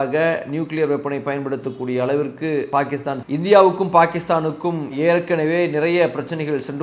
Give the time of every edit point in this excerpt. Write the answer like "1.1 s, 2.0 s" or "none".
2.8 s